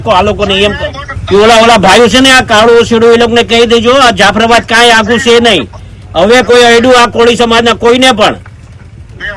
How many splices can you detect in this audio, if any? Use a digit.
1